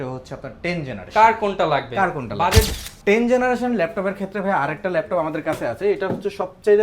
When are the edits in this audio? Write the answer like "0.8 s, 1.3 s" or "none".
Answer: 2.7 s